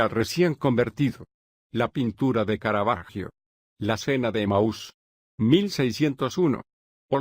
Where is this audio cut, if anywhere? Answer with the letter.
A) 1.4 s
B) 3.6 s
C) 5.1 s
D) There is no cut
B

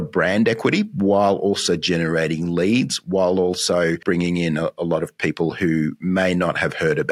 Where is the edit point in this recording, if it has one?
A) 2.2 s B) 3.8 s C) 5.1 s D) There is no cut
D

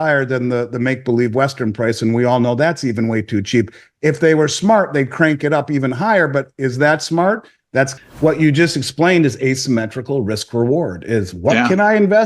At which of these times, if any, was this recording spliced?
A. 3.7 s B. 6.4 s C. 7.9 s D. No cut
C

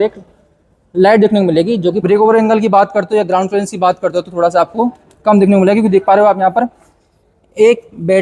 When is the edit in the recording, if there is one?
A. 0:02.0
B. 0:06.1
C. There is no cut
A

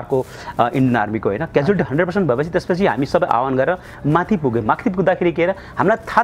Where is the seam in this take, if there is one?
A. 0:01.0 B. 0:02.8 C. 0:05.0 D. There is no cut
D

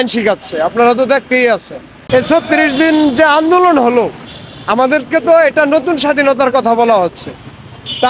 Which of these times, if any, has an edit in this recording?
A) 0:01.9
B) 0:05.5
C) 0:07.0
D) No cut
A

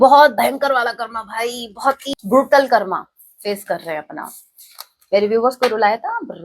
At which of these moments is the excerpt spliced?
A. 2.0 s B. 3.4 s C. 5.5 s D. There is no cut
A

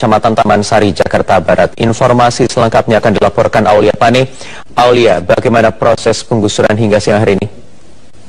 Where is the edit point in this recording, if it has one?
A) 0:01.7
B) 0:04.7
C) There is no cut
C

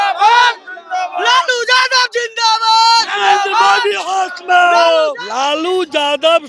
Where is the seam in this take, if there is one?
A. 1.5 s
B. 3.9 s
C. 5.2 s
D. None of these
C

